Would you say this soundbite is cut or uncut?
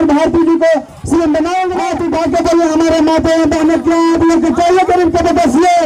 cut